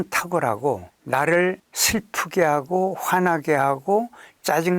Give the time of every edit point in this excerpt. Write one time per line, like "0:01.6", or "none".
0:00.9
0:01.7